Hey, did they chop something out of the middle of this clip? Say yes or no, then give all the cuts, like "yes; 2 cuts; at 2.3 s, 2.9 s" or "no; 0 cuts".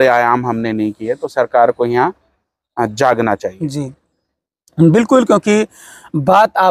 no; 0 cuts